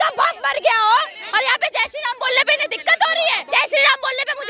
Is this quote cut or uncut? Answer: cut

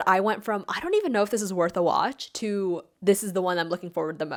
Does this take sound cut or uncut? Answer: uncut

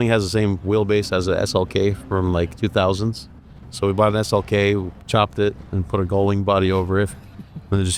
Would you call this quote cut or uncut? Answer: uncut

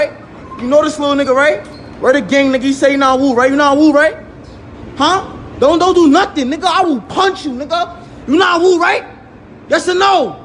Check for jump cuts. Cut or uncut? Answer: uncut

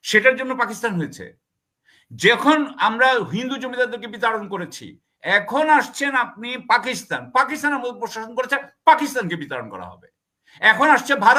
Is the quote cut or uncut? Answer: uncut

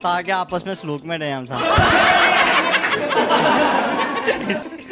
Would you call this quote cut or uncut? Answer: uncut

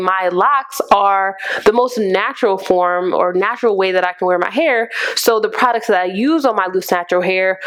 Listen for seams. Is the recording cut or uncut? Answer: uncut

